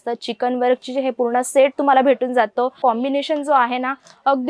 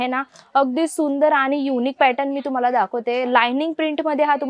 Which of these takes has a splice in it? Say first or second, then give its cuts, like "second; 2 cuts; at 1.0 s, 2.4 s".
first; 1 cut; at 2.8 s